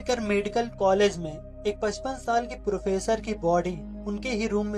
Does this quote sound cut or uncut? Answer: uncut